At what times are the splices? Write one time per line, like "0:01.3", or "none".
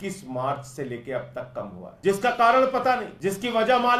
0:01.8
0:03.1

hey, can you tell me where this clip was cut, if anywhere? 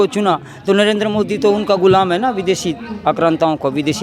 none

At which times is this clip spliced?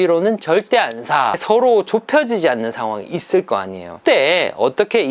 0:01.4
0:04.0

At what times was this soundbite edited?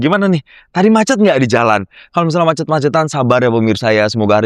none

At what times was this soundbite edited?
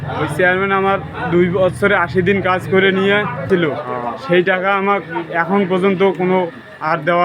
0:03.4

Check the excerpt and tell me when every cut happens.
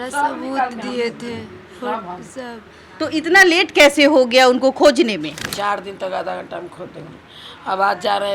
0:05.4

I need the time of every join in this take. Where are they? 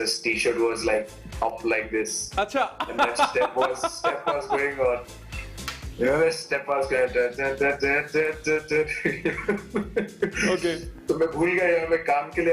none

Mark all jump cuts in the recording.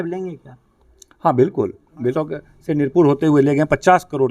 0:02.1

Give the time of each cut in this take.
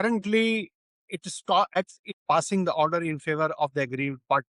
0:01.7

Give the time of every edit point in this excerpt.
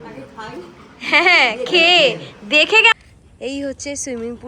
0:02.9

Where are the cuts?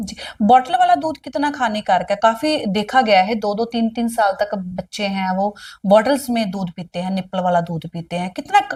none

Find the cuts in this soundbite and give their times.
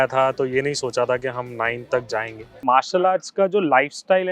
0:02.6

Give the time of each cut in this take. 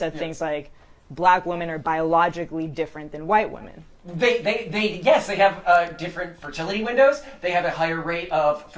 0:04.2

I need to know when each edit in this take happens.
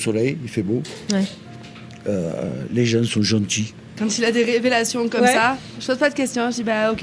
0:03.9
0:05.8

